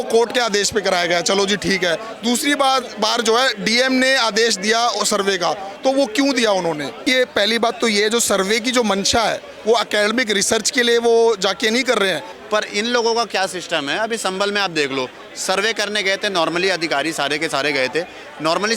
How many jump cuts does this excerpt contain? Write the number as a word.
two